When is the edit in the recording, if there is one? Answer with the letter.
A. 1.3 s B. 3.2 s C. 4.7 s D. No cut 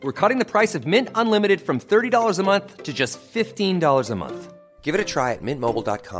D